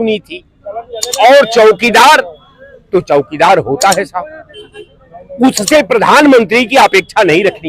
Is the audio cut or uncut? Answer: uncut